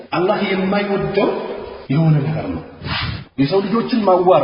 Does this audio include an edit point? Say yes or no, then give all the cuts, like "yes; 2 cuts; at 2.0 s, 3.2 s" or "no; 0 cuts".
yes; 2 cuts; at 1.7 s, 2.9 s